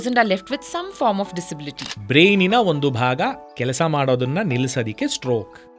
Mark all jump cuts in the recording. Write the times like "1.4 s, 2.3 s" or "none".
1.8 s